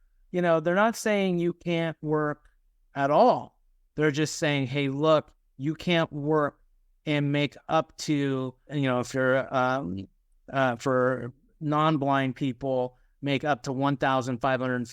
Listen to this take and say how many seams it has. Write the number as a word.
one